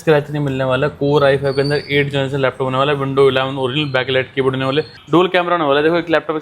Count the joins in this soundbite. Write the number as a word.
one